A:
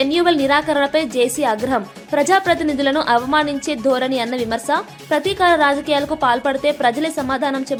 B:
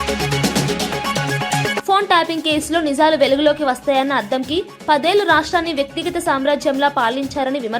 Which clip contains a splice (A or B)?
B